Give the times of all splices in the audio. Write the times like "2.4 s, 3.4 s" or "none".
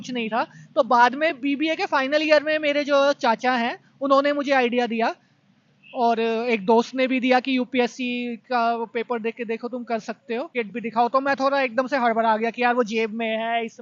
10.5 s